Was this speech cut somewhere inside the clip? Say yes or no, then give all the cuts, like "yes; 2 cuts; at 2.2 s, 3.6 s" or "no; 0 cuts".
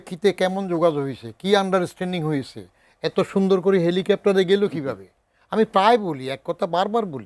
no; 0 cuts